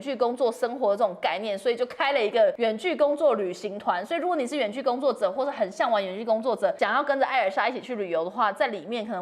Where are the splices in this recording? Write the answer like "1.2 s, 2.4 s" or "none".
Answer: 2.6 s, 6.8 s